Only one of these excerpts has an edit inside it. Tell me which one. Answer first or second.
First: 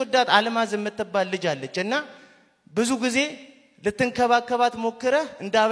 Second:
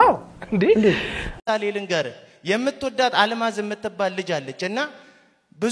second